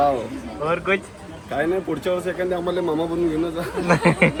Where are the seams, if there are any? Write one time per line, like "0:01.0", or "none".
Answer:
none